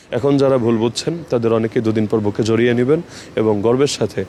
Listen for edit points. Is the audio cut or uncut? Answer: uncut